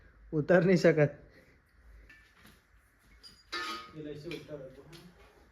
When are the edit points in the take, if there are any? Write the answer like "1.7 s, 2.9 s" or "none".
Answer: 2.1 s